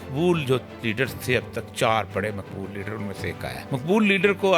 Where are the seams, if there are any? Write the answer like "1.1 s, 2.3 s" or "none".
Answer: 3.7 s